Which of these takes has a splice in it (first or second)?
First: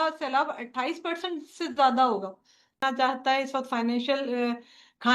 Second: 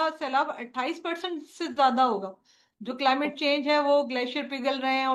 first